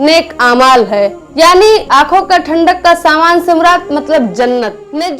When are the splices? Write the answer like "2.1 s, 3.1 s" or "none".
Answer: 1.9 s